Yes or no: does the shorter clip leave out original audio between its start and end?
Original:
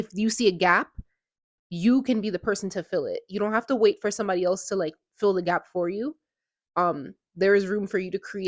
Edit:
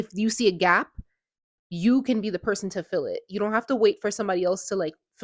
no